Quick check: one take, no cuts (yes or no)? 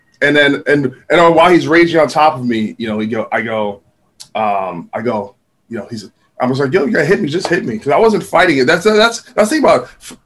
yes